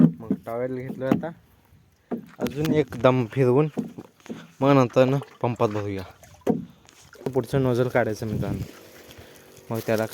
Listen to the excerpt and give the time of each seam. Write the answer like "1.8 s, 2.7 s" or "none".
7.3 s